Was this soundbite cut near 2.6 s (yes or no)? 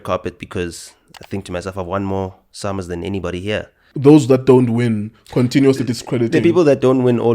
no